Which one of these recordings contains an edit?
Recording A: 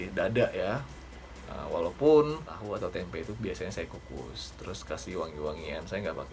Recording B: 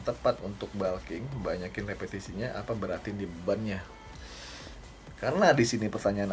A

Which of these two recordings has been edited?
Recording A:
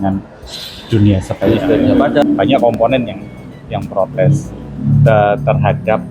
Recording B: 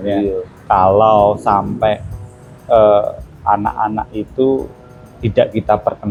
A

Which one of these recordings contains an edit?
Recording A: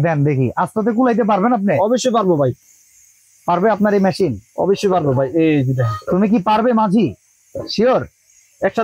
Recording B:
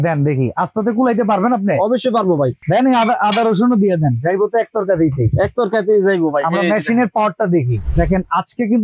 B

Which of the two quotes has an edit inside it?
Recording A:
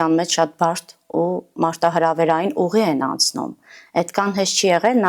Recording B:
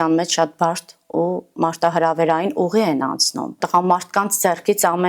B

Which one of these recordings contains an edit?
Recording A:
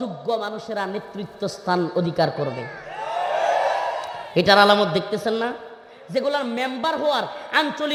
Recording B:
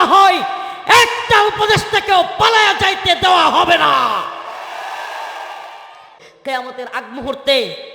B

